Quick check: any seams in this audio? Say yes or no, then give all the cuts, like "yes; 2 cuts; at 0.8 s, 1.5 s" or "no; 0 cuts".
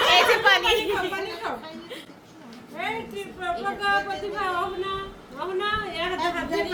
no; 0 cuts